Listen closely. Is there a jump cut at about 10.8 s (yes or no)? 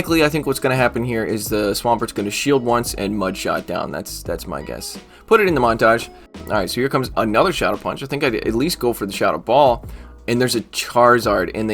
no